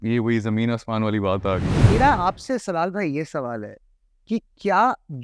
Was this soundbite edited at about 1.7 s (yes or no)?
yes